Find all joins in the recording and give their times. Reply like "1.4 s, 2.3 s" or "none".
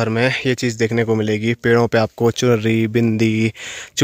none